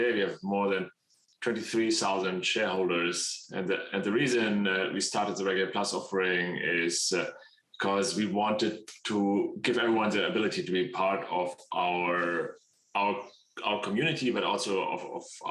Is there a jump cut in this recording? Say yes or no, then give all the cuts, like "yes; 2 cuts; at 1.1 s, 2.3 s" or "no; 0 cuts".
no; 0 cuts